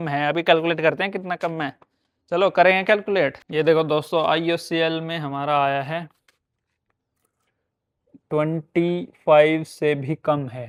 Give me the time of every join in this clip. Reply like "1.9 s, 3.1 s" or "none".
none